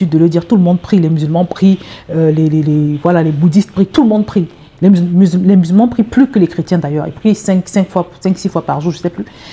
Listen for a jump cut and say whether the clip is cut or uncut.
uncut